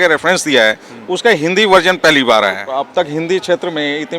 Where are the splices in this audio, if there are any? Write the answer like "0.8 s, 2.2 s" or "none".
2.7 s